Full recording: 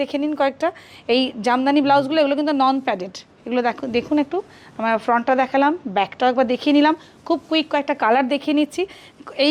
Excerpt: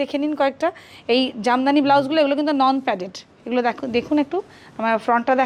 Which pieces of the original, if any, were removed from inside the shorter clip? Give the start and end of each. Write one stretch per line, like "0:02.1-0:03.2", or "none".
none